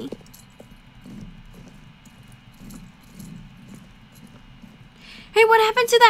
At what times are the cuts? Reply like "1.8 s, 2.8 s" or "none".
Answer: none